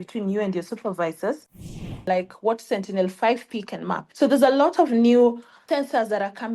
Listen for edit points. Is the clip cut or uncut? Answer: cut